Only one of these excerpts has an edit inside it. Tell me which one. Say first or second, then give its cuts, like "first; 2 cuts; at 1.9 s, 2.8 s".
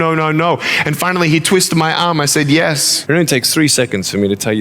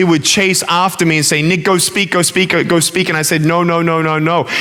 first; 1 cut; at 2.9 s